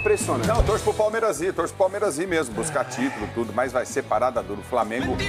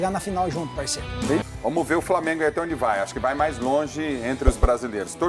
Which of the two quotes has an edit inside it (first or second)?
second